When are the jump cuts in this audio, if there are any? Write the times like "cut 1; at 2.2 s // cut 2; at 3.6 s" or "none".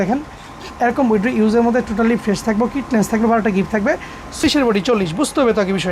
cut 1; at 4.4 s